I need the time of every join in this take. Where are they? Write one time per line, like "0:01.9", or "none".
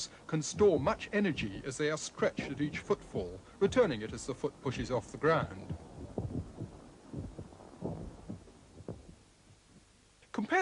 0:03.0